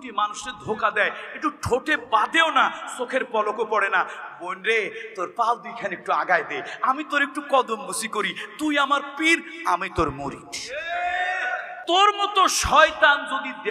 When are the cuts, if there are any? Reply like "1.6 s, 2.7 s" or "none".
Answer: 11.7 s